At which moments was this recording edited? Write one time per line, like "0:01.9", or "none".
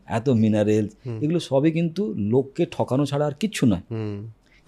none